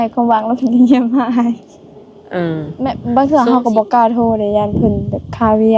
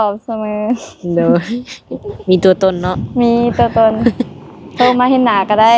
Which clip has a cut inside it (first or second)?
first